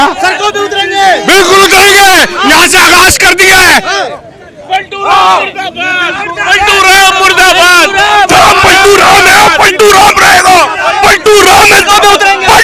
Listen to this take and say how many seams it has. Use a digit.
0